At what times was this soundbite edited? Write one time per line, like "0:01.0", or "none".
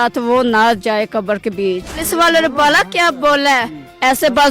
0:02.0